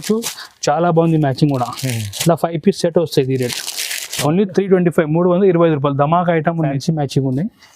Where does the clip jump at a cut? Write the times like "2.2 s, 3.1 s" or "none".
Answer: 6.8 s